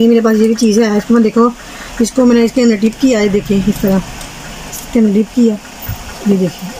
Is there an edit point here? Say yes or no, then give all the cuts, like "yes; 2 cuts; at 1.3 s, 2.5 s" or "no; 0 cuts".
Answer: no; 0 cuts